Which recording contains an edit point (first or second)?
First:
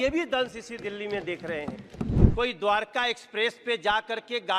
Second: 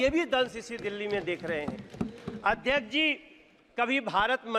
first